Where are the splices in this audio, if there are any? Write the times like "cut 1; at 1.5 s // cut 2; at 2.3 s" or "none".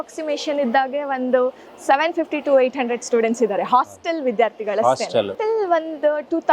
cut 1; at 5.4 s